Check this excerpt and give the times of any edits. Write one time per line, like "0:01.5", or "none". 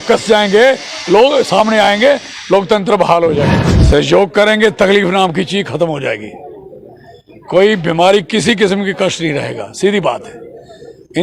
0:03.6